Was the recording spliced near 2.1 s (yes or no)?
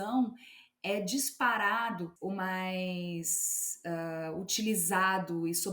yes